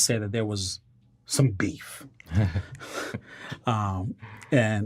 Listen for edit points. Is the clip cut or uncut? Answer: uncut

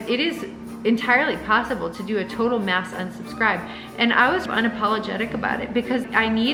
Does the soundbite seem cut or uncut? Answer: uncut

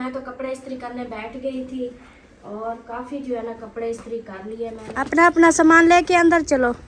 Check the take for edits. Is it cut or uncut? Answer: cut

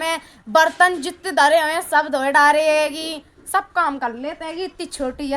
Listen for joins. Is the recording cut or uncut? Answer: uncut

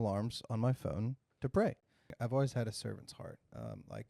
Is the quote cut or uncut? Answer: cut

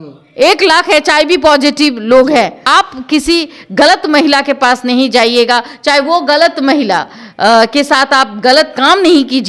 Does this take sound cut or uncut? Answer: cut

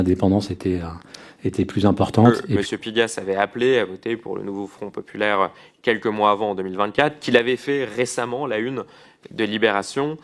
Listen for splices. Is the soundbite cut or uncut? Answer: cut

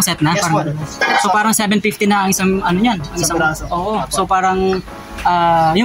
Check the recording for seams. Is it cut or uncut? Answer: uncut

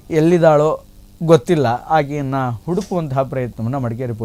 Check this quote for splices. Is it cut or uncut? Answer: uncut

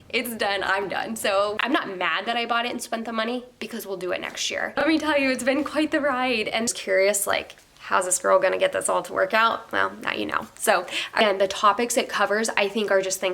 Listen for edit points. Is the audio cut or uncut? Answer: cut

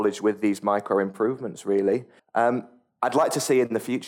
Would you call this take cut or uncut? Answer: cut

